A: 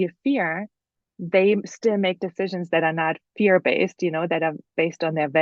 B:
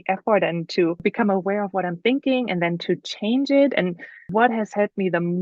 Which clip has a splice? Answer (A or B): B